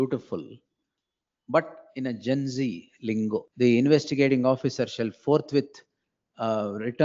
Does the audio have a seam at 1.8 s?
no; 1 cut; at 3.5 s

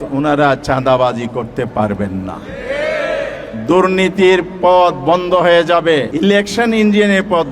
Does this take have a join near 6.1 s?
yes; 1 cut; at 6.1 s

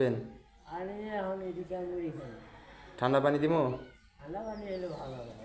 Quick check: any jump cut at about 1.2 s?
no; 0 cuts

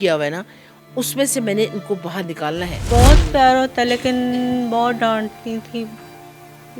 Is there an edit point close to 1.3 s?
no; 1 cut; at 2.8 s

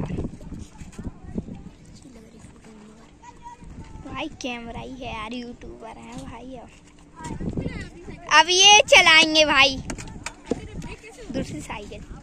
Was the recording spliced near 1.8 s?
yes; 2 cuts; at 1.8 s, 7.3 s

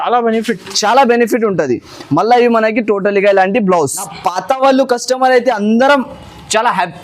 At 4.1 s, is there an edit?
yes; 1 cut; at 4.1 s

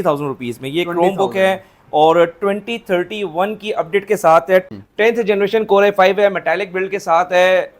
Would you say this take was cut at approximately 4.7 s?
yes; 1 cut; at 4.7 s

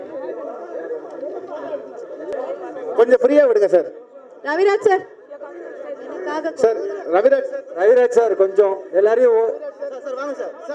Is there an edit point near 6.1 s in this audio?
no; 1 cut; at 2.3 s

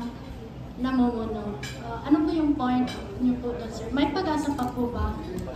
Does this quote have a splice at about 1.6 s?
no; 0 cuts

